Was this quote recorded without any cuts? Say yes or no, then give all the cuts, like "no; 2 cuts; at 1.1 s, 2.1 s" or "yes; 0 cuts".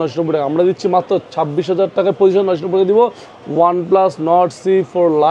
yes; 0 cuts